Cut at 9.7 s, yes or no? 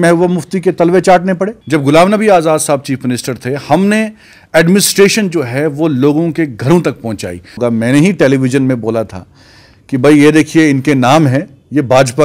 no